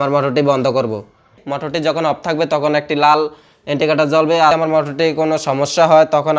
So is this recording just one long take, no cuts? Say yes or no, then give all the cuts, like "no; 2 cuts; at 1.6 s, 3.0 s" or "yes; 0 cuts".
no; 2 cuts; at 1.4 s, 4.5 s